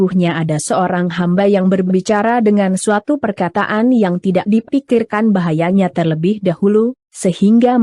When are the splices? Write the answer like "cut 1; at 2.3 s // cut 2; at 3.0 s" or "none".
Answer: cut 1; at 1.0 s